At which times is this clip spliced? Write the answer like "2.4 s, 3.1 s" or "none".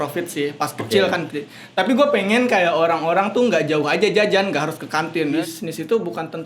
5.3 s